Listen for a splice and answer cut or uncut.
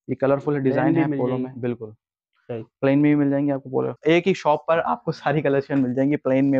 cut